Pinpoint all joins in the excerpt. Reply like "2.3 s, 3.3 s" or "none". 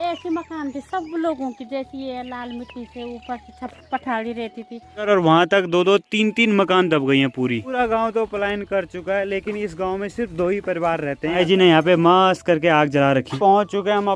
5.1 s, 7.8 s, 11.4 s, 13.3 s